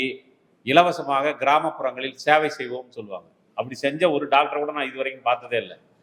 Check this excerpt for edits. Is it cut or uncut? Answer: uncut